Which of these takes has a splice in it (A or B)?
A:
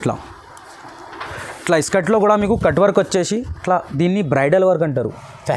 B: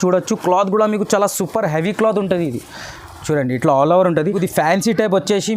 B